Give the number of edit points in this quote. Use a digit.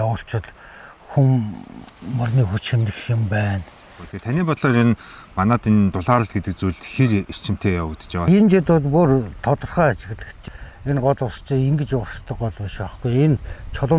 3